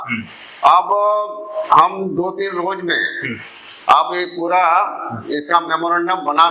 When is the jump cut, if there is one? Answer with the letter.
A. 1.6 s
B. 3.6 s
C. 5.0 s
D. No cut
D